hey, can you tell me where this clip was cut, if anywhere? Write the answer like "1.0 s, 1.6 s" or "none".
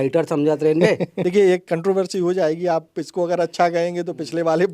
1.1 s